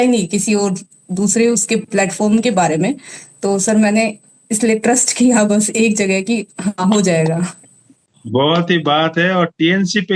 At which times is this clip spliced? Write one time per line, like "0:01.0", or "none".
none